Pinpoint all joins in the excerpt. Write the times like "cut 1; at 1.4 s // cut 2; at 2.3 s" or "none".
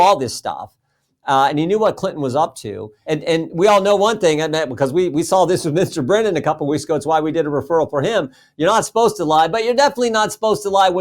cut 1; at 2.9 s